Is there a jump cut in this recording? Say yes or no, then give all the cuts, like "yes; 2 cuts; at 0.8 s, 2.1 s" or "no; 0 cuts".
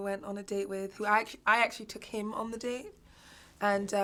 no; 0 cuts